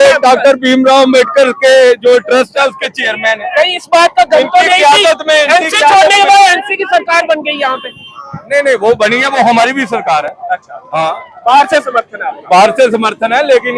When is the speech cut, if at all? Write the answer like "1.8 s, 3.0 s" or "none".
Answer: none